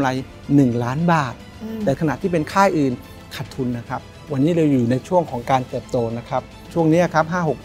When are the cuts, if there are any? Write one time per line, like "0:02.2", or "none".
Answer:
0:02.0
0:04.2
0:06.6